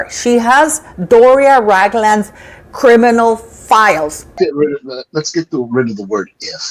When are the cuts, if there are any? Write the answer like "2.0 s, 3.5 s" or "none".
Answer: 4.3 s